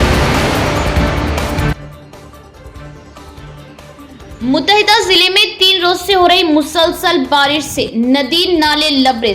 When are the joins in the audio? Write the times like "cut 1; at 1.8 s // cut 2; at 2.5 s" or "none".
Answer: cut 1; at 1.5 s